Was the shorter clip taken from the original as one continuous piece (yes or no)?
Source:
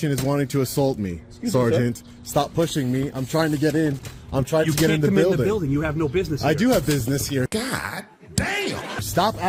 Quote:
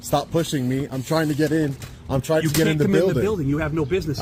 yes